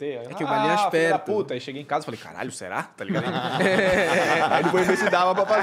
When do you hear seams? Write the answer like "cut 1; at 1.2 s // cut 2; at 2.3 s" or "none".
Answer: none